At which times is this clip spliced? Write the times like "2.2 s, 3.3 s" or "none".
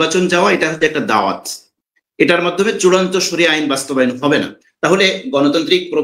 none